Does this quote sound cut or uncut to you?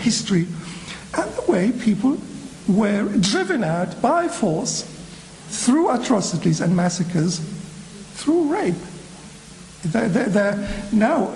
uncut